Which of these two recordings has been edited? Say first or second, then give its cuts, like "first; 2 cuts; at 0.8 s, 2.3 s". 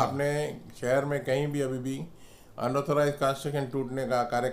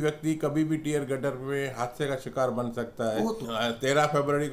second; 1 cut; at 3.4 s